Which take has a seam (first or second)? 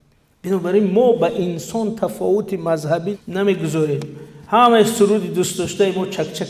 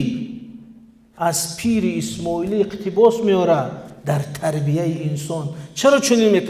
first